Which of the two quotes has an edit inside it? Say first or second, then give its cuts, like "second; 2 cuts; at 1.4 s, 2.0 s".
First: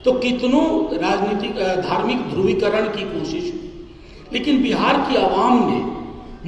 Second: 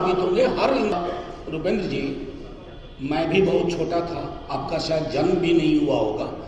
second; 1 cut; at 0.9 s